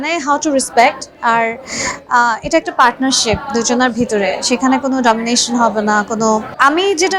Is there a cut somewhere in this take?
no; 0 cuts

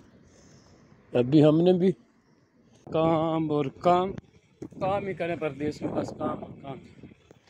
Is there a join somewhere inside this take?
yes; 1 cut; at 2.8 s

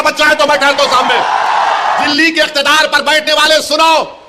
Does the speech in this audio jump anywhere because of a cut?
yes; 1 cut; at 2.1 s

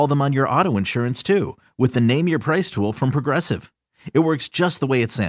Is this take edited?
no; 0 cuts

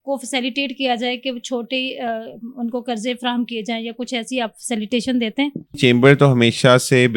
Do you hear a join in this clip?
yes; 1 cut; at 5.8 s

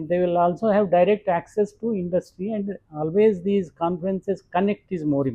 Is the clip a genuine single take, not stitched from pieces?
yes; 0 cuts

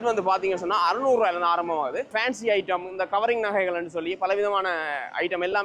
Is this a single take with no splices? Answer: no; 1 cut; at 2.1 s

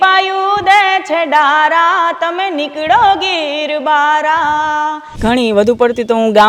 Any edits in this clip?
yes; 1 cut; at 5.1 s

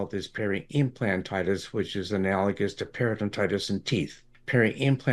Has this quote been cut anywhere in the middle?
no; 0 cuts

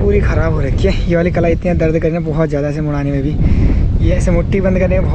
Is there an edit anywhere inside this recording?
no; 0 cuts

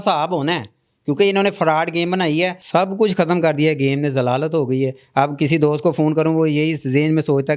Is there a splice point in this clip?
yes; 1 cut; at 2.6 s

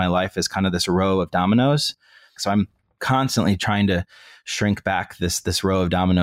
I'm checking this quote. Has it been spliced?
yes; 1 cut; at 2.4 s

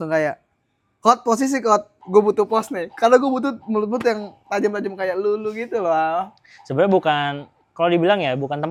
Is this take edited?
no; 0 cuts

